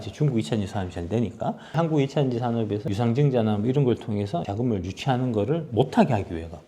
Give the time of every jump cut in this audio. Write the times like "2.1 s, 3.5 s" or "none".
1.7 s, 2.8 s, 4.5 s